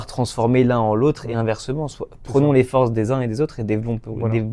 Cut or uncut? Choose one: uncut